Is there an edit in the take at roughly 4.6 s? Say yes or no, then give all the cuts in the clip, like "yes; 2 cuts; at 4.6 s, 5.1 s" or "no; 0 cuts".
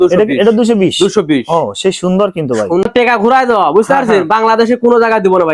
no; 1 cut; at 2.8 s